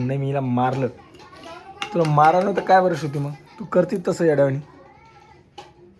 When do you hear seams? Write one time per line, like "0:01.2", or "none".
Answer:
none